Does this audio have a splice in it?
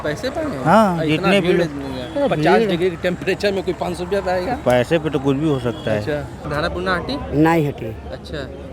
yes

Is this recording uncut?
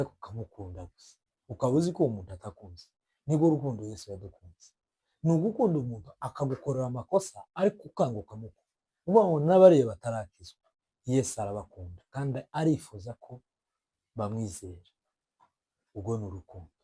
yes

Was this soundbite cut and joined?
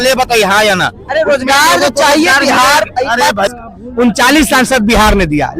yes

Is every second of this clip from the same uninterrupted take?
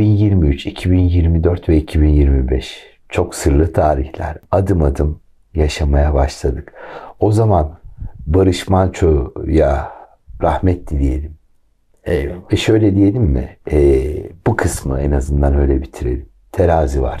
yes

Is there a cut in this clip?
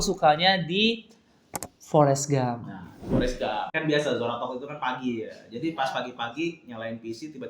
yes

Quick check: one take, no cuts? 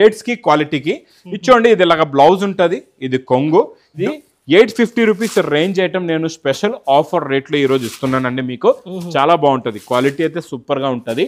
no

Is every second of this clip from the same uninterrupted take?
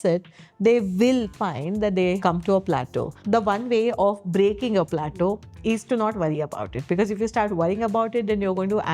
no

